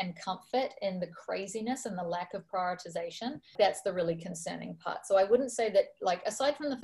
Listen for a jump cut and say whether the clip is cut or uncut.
cut